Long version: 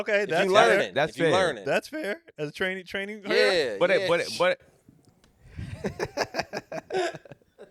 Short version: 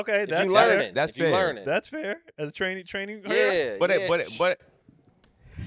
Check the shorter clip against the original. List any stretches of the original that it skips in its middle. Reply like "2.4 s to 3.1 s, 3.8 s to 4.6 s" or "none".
none